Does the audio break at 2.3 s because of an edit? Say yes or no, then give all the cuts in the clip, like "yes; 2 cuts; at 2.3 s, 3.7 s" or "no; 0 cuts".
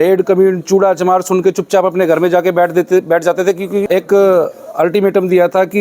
no; 1 cut; at 3.9 s